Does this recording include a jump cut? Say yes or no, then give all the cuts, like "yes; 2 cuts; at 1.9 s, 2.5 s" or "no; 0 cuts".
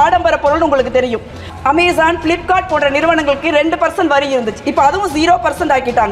yes; 1 cut; at 1.4 s